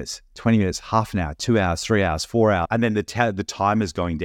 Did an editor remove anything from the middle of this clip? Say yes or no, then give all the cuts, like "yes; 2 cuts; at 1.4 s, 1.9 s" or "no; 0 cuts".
yes; 1 cut; at 2.6 s